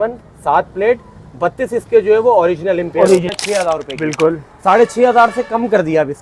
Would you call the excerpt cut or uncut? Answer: cut